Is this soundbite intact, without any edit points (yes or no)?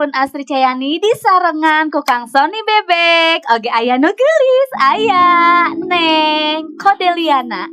yes